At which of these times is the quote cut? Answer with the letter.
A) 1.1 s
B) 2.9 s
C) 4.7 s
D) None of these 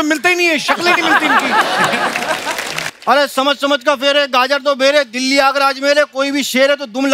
B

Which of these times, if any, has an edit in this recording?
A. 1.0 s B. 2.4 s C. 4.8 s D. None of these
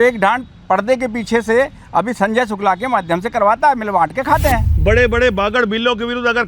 C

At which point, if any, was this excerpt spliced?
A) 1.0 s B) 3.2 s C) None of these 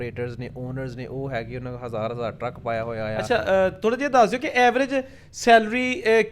B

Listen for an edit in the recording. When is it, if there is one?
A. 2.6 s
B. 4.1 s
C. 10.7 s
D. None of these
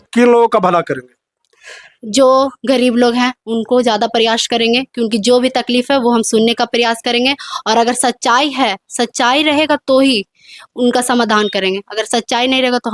D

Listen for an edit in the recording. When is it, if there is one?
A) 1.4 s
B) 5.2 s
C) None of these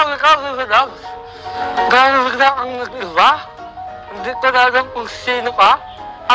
A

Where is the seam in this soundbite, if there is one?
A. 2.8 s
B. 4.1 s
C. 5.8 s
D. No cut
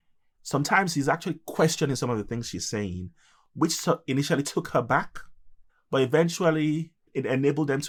D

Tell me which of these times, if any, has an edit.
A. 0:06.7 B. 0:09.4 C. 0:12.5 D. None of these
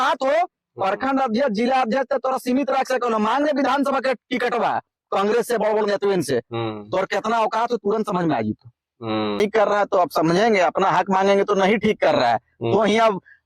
B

